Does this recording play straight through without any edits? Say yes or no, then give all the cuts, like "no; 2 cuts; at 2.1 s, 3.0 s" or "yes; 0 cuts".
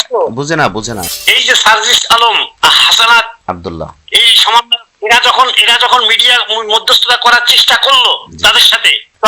no; 1 cut; at 1.0 s